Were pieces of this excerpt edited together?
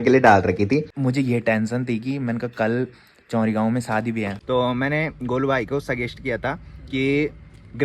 yes; 2 cuts; at 0.9 s, 4.4 s

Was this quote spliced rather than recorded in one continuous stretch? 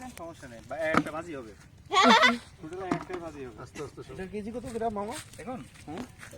yes; 1 cut; at 4.0 s

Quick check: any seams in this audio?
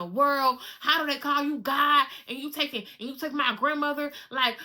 no; 0 cuts

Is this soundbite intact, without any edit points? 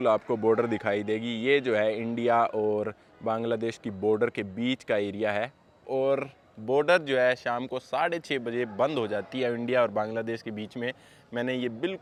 yes; 0 cuts

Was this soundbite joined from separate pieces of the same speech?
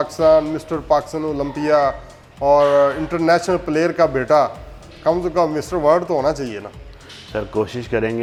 no; 0 cuts

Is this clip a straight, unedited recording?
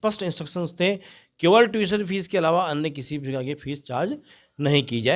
yes; 0 cuts

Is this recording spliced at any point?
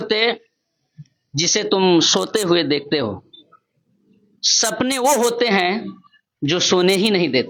no; 0 cuts

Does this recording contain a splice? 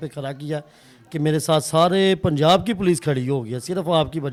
no; 0 cuts

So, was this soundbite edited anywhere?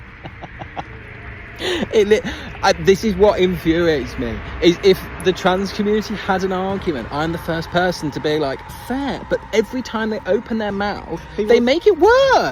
no; 0 cuts

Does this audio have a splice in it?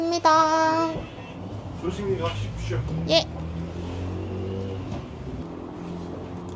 no; 0 cuts

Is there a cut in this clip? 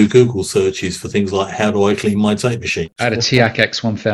yes; 1 cut; at 2.8 s

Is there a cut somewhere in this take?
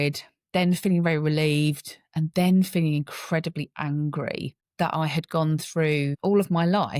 no; 0 cuts

